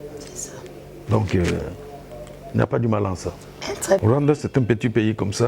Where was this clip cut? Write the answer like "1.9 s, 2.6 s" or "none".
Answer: 4.0 s